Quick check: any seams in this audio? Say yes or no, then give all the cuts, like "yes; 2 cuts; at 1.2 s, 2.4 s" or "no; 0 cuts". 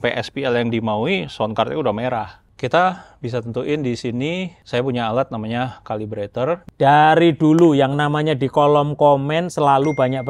yes; 3 cuts; at 2.4 s, 4.6 s, 6.7 s